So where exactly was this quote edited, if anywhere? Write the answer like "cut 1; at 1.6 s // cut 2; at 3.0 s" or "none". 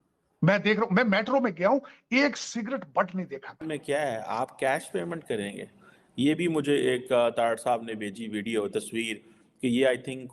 cut 1; at 3.6 s